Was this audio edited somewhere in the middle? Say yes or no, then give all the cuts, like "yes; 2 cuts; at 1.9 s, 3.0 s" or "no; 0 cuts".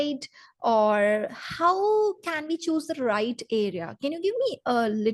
no; 0 cuts